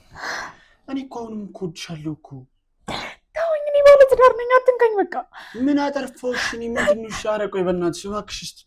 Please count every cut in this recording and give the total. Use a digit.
0